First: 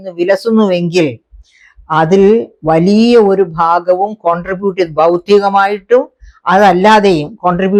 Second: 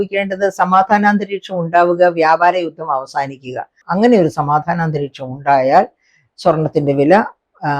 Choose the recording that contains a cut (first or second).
second